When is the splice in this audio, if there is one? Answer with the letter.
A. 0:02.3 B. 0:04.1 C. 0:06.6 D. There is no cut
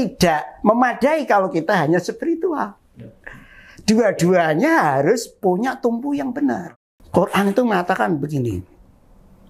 C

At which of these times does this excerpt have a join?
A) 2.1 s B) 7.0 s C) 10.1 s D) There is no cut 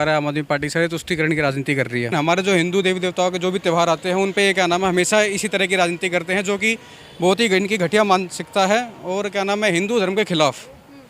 A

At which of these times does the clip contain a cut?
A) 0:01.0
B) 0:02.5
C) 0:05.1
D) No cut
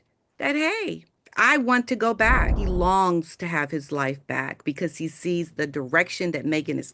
B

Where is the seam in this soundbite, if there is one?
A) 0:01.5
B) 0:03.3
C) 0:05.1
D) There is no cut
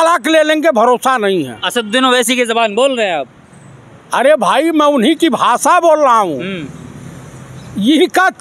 D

